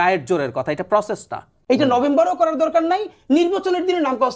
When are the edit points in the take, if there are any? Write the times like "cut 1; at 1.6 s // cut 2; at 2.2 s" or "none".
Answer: cut 1; at 1.5 s